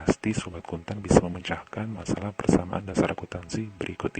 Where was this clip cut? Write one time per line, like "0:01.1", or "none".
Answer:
none